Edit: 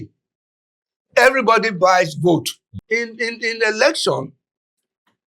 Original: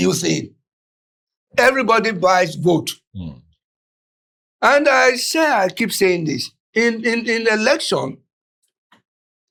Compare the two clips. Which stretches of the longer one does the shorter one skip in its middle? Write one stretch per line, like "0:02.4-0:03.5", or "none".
0:03.1-0:06.5